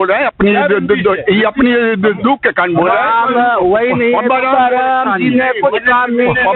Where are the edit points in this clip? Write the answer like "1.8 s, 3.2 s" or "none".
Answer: none